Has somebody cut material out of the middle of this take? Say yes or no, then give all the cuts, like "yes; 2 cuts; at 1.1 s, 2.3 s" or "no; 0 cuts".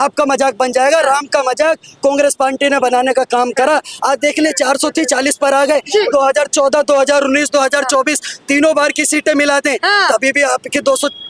no; 0 cuts